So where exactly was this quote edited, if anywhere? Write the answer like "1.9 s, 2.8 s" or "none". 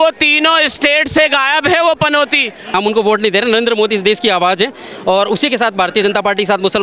2.7 s